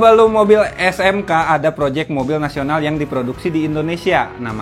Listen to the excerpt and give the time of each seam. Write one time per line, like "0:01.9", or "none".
none